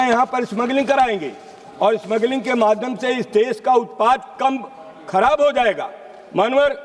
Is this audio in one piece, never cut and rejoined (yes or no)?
yes